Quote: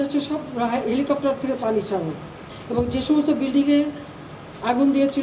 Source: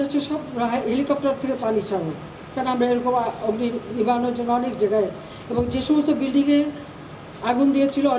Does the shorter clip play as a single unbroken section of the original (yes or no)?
no